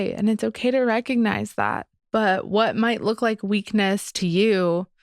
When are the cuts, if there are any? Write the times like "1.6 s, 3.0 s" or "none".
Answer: 1.9 s